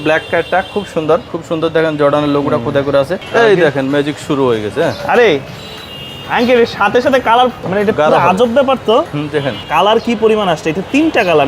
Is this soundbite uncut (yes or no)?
no